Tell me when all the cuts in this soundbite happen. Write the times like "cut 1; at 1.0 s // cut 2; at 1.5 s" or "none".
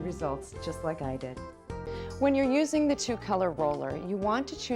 cut 1; at 1.9 s

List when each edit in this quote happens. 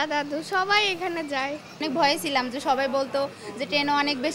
cut 1; at 1.7 s

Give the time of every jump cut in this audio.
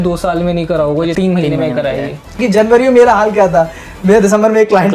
cut 1; at 1.1 s // cut 2; at 2.4 s

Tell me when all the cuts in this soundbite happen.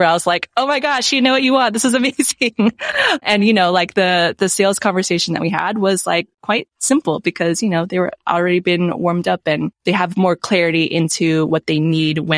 none

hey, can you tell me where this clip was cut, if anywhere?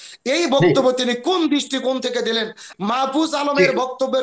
cut 1; at 2.7 s

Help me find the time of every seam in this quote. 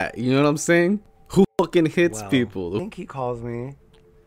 cut 1; at 1.2 s // cut 2; at 2.8 s

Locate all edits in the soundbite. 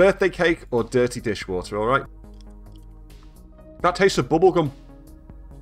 cut 1; at 2.1 s // cut 2; at 3.4 s

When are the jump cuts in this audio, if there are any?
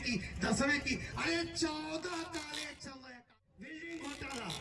cut 1; at 3.0 s

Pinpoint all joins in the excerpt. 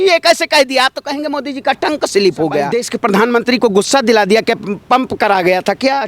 cut 1; at 2.8 s

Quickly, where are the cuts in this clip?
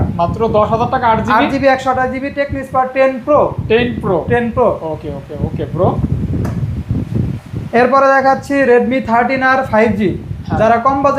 none

